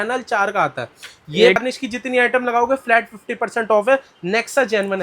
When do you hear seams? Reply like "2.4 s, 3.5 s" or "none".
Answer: 1.6 s